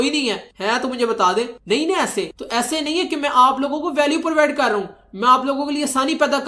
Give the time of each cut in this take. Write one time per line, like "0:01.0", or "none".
none